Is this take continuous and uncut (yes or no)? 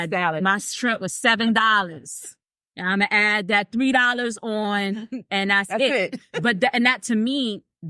yes